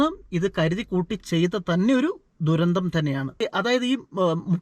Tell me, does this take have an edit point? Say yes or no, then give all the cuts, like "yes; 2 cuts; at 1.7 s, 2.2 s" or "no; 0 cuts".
yes; 1 cut; at 3.4 s